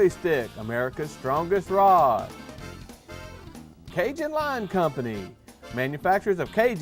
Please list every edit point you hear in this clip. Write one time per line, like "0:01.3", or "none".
none